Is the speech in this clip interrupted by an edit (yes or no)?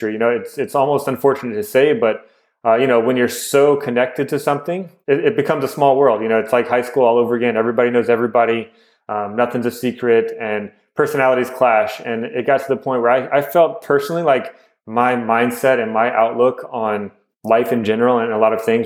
yes